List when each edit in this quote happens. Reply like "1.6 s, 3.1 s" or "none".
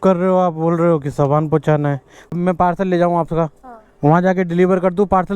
2.4 s